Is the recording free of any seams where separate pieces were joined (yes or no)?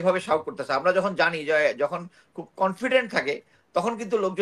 yes